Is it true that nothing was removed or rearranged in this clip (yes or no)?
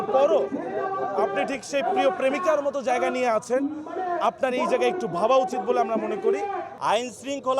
no